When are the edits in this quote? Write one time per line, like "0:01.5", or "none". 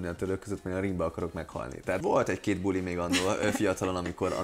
0:02.0